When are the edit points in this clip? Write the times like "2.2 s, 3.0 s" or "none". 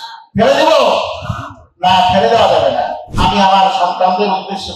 3.0 s